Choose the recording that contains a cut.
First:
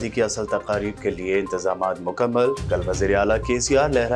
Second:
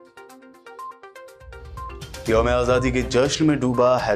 second; 1 cut; at 1.0 s

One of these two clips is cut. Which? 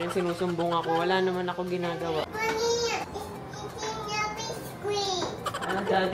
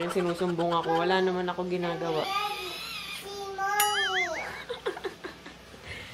first; 2 cuts; at 2.3 s, 3.1 s

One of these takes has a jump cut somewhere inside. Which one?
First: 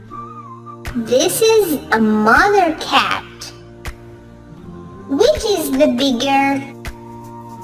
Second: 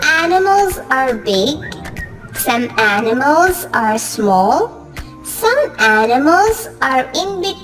first; 1 cut; at 6.7 s

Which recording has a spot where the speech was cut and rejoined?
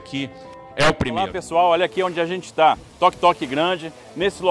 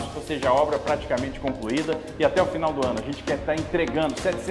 first; 1 cut; at 1.4 s

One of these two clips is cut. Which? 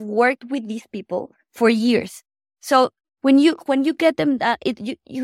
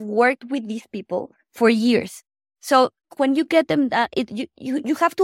second; 1 cut; at 3.1 s

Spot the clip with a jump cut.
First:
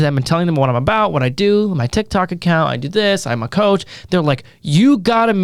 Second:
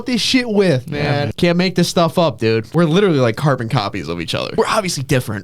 second; 3 cuts; at 1.3 s, 2.7 s, 4.5 s

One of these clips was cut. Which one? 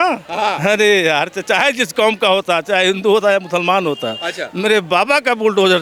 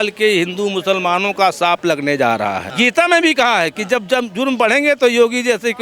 second; 1 cut; at 2.7 s

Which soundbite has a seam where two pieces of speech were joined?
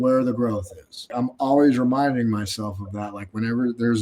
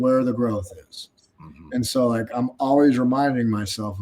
first; 1 cut; at 1.1 s

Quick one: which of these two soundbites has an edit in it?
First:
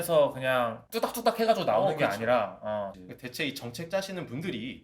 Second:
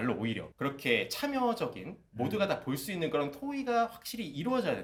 first; 1 cut; at 3.0 s

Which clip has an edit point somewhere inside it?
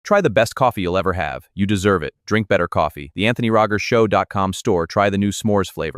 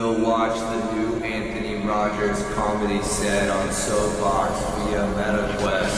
first; 1 cut; at 1.9 s

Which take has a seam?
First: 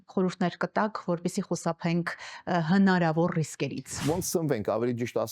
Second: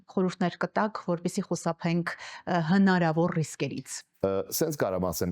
first; 1 cut; at 4.0 s

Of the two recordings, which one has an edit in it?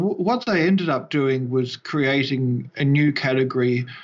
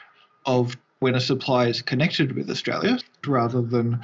second; 2 cuts; at 1.0 s, 3.1 s

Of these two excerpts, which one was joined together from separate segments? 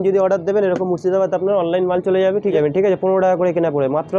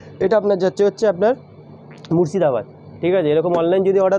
first; 1 cut; at 2.5 s

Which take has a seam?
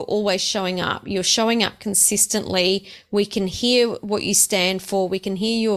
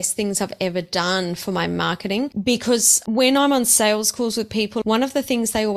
second; 3 cuts; at 2.3 s, 2.9 s, 4.8 s

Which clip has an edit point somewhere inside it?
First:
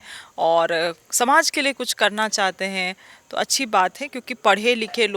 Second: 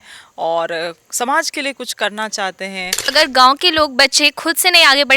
second; 1 cut; at 3.1 s

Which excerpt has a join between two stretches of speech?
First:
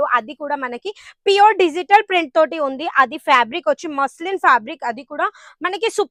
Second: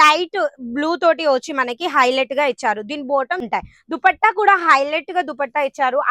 second; 1 cut; at 3.4 s

